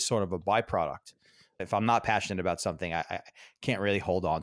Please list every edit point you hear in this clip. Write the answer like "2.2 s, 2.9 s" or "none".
1.6 s